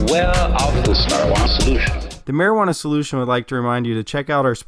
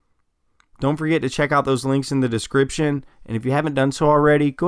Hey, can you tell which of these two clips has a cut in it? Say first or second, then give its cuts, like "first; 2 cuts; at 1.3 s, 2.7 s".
first; 1 cut; at 2.2 s